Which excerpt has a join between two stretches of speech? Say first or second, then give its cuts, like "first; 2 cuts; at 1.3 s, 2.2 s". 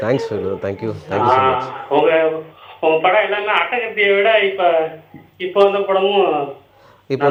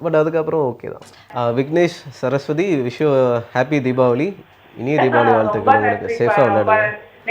second; 1 cut; at 1.3 s